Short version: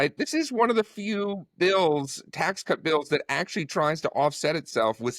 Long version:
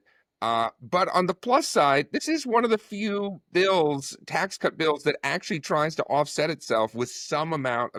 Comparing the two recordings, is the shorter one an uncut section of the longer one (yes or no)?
yes